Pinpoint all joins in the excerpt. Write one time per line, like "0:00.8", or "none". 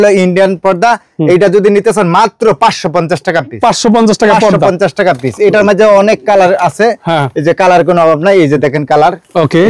none